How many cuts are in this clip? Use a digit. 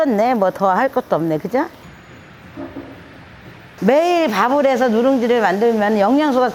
1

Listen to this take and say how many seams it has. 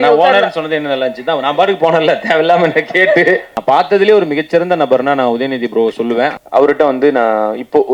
2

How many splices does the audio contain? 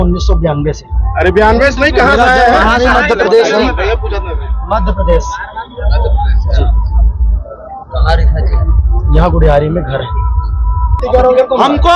1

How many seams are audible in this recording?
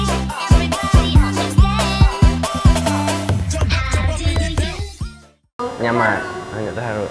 1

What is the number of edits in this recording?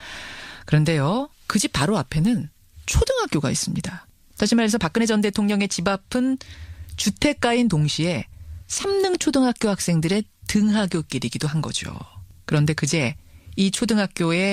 0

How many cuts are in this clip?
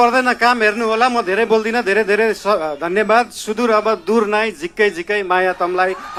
0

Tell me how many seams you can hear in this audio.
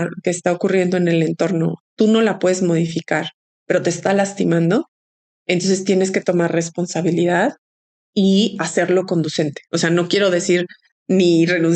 0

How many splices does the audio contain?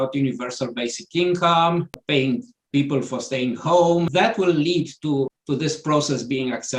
3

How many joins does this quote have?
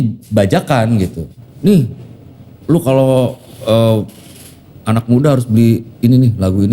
1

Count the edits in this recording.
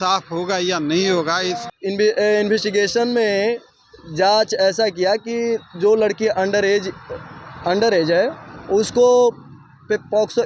1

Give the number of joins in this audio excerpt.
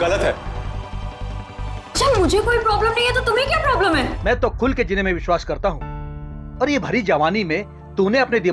1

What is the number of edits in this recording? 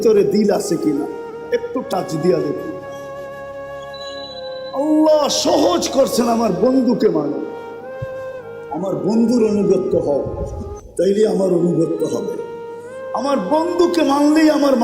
2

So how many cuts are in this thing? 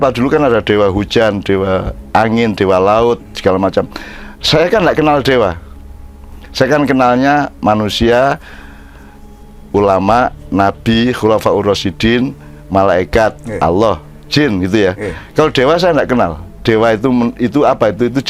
0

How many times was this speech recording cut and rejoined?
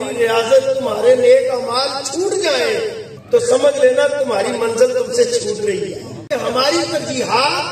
2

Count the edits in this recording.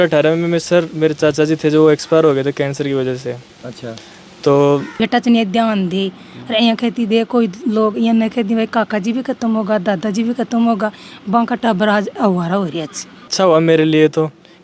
2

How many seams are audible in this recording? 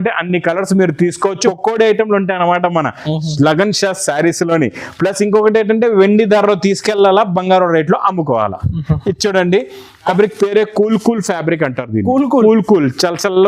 2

